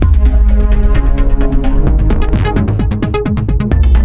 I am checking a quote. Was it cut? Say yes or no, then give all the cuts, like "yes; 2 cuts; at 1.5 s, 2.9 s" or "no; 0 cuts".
no; 0 cuts